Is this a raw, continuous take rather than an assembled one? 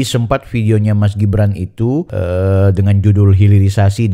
no; 1 cut; at 2.1 s

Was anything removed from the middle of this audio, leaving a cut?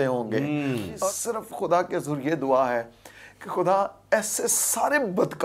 yes; 1 cut; at 0.9 s

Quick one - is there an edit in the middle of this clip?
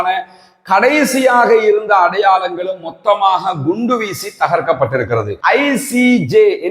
yes; 1 cut; at 5.3 s

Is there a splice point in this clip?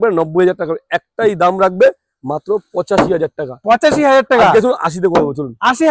no; 0 cuts

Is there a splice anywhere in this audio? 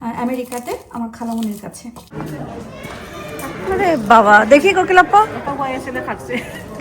yes; 1 cut; at 2.3 s

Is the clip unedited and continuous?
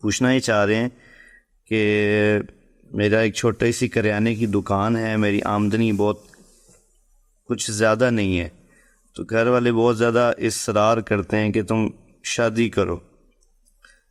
yes; 0 cuts

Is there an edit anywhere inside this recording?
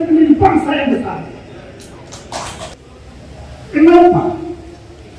yes; 1 cut; at 2.7 s

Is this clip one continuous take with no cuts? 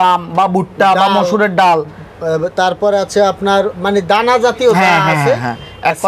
yes; 0 cuts

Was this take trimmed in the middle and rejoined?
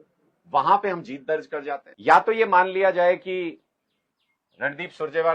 yes; 1 cut; at 1.9 s

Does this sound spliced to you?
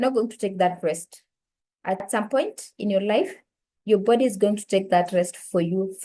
yes; 1 cut; at 2.1 s

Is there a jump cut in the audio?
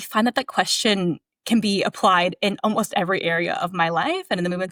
no; 0 cuts

